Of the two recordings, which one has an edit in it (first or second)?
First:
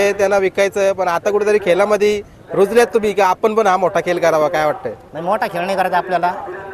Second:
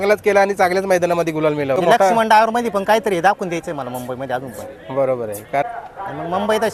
second